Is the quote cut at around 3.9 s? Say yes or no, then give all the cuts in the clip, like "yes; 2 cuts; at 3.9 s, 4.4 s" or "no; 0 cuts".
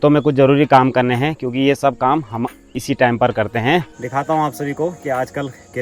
yes; 1 cut; at 3.9 s